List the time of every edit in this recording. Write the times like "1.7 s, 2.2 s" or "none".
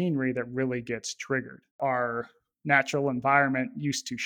1.8 s

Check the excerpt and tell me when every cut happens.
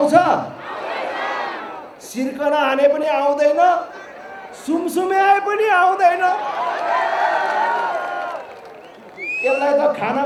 none

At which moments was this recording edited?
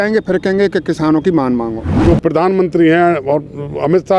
1.8 s

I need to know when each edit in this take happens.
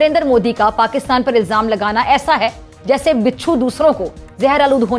none

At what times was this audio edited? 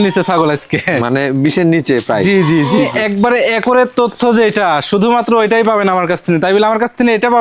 2.9 s

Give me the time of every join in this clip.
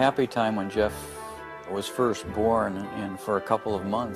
3.0 s

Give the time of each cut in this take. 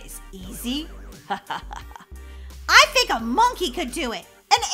none

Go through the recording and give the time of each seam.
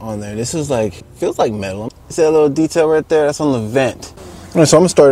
1.1 s, 1.9 s

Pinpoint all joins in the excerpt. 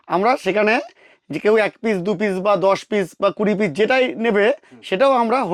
none

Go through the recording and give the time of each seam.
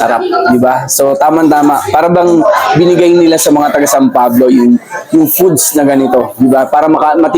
none

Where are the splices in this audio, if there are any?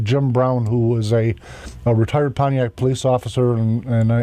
2.6 s

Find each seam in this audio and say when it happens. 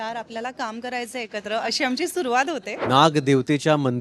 2.7 s

